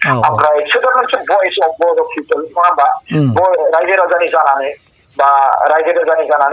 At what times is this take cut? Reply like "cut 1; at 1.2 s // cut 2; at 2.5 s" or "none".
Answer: none

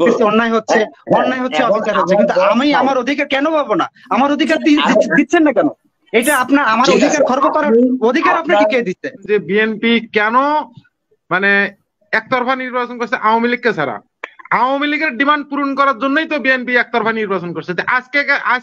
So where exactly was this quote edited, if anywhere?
cut 1; at 9.2 s

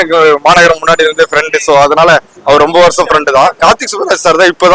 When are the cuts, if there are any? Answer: cut 1; at 3.6 s

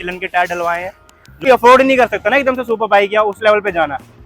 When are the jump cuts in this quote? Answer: cut 1; at 1.5 s

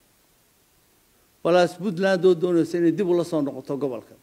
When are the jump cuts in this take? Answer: cut 1; at 1.0 s

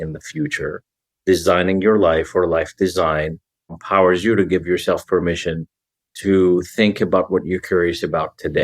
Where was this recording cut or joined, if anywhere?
cut 1; at 3.8 s

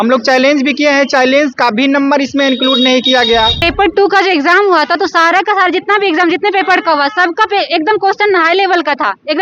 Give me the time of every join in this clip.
cut 1; at 3.6 s

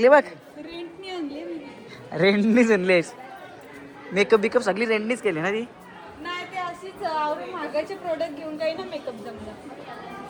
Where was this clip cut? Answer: none

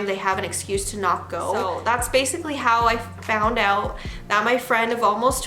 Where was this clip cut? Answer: cut 1; at 1.6 s

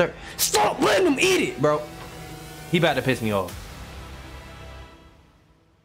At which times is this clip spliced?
none

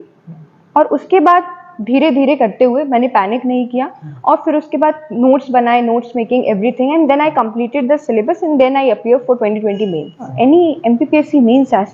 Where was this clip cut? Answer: cut 1; at 10.3 s

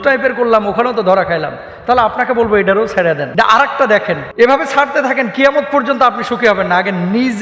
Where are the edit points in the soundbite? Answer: cut 1; at 3.3 s // cut 2; at 4.3 s

